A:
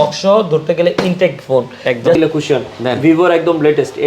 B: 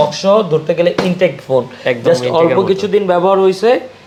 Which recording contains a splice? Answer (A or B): A